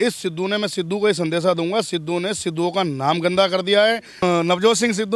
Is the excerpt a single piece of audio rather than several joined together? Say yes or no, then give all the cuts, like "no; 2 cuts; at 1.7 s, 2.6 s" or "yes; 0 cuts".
no; 1 cut; at 4.2 s